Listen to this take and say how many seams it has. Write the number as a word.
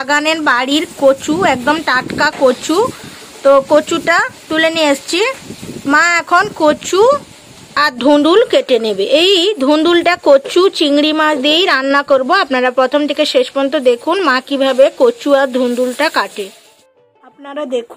zero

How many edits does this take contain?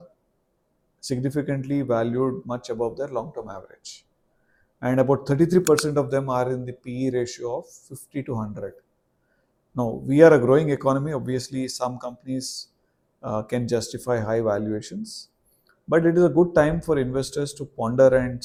zero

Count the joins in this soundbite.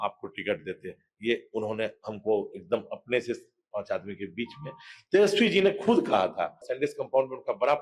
one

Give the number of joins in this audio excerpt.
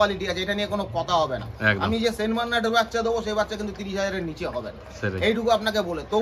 zero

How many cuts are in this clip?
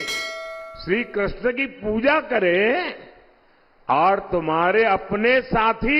zero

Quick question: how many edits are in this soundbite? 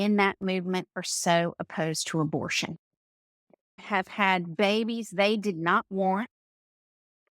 one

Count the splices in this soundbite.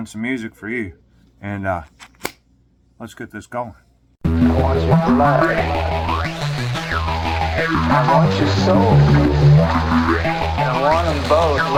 zero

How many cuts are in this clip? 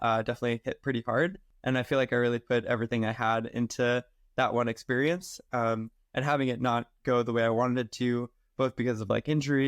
one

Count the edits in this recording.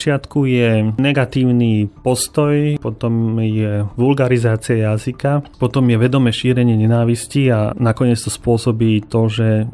two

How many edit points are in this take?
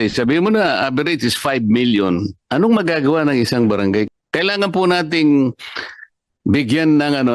two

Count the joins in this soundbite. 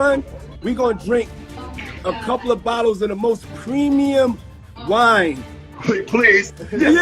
zero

